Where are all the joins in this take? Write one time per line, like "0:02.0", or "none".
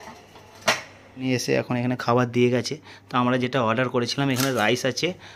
0:01.2